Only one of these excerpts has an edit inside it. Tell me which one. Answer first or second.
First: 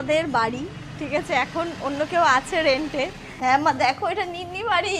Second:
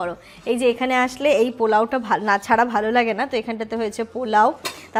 first